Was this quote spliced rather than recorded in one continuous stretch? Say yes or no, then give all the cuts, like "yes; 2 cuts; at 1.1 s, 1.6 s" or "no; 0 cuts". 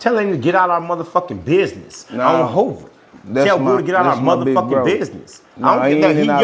no; 0 cuts